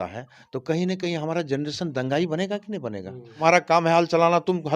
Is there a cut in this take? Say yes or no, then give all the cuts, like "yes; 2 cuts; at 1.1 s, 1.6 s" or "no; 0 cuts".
yes; 1 cut; at 3.4 s